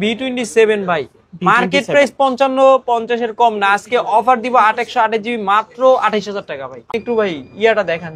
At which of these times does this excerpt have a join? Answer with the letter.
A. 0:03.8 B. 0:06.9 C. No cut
B